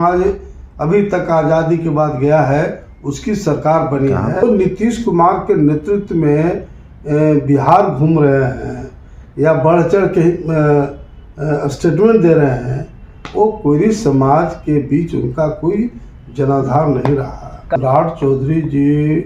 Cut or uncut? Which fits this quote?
cut